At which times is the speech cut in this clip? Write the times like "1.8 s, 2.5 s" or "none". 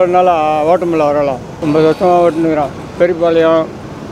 1.5 s